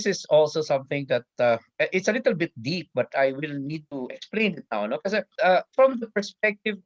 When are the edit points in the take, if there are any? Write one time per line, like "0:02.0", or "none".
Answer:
none